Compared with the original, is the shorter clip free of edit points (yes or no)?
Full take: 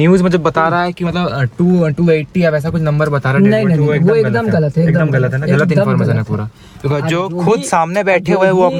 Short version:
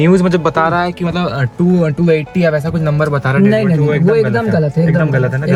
yes